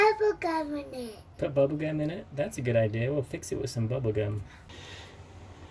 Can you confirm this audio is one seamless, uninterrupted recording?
no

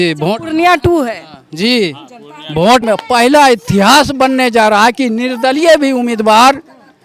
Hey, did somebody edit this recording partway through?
yes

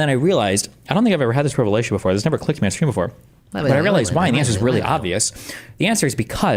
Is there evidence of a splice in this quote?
no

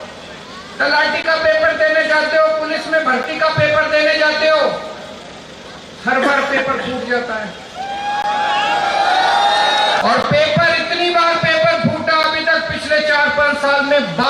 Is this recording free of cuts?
no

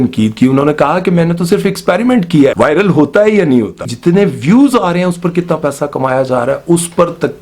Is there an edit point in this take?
yes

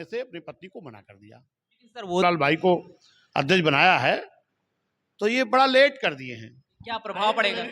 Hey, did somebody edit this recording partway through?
yes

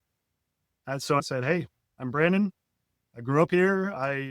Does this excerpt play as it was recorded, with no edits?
no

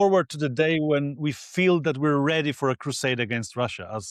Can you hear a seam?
no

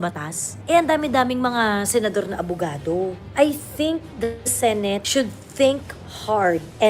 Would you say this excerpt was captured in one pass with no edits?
no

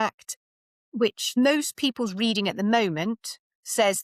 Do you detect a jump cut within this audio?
no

